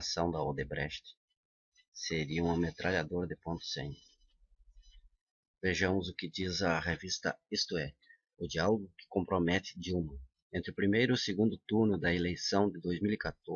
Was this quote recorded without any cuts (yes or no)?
yes